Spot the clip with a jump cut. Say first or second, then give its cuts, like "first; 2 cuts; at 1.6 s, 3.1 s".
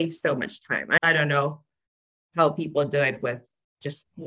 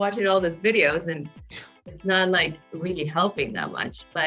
first; 1 cut; at 1.0 s